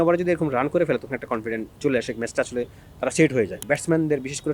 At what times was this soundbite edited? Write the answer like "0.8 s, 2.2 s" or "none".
3.6 s